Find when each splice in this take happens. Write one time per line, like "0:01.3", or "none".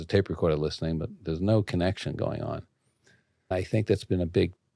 0:03.5